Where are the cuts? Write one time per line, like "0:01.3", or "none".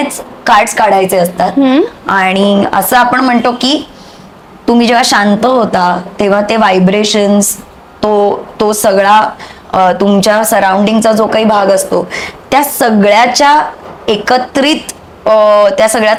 none